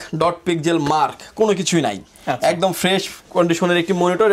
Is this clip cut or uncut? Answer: uncut